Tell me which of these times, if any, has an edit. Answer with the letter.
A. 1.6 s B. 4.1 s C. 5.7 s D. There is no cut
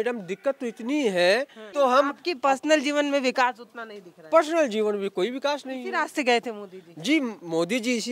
A